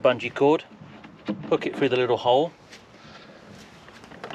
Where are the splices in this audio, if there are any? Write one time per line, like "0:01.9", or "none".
none